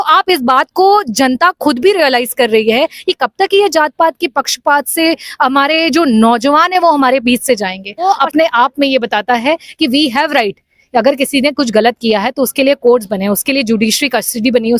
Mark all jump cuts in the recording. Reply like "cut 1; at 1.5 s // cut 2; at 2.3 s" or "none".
cut 1; at 8.0 s